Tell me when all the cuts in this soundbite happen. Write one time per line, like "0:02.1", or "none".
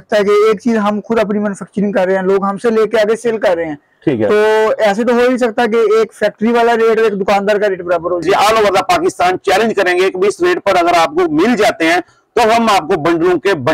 0:08.2